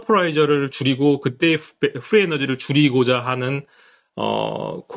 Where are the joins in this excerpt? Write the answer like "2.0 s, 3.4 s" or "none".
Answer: none